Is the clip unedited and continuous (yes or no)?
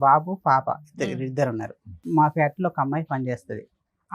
no